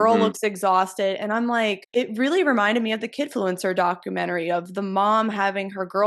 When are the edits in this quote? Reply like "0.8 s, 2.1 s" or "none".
1.8 s